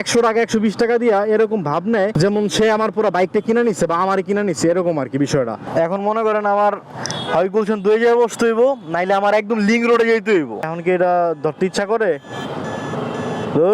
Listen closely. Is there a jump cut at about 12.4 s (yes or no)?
no